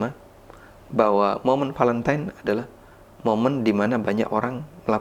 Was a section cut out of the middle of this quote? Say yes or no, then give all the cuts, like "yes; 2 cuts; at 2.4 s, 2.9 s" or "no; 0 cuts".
no; 0 cuts